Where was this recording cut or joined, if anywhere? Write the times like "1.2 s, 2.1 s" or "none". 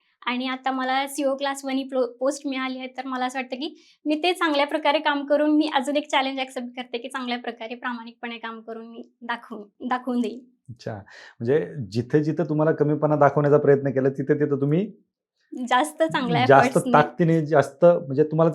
none